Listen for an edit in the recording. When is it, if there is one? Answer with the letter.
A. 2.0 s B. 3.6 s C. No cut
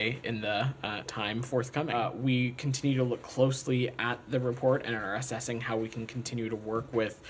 A